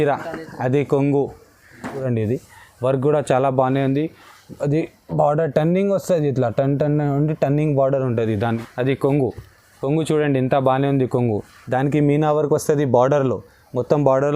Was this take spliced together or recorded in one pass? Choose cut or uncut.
cut